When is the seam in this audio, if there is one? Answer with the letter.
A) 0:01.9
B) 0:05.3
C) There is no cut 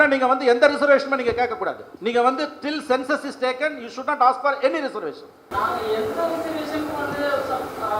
A